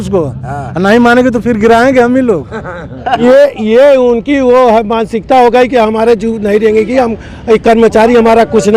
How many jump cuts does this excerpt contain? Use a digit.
1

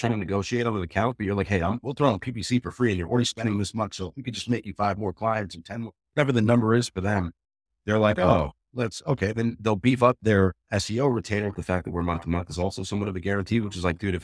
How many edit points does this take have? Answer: 1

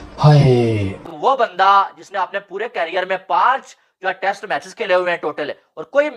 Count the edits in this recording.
1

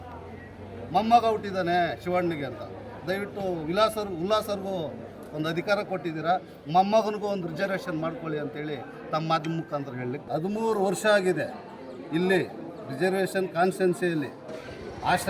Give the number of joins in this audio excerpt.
1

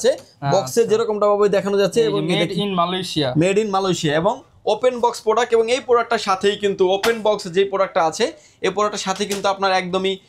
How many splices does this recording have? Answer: 0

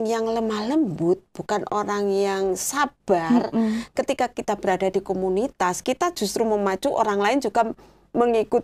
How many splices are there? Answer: 0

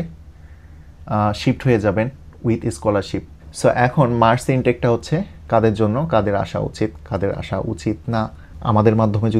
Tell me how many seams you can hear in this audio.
2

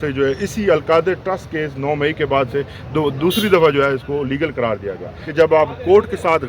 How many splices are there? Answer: 1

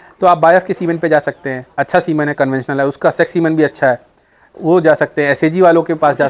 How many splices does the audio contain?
0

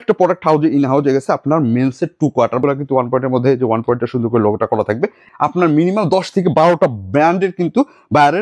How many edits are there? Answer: 2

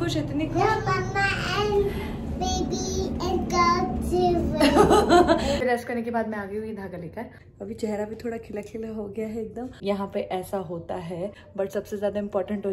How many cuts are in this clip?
4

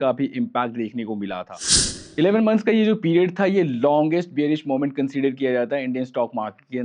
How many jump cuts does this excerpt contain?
1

